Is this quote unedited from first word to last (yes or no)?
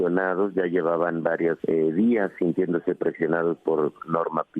no